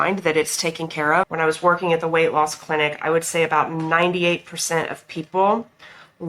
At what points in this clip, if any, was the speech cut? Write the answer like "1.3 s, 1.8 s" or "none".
1.3 s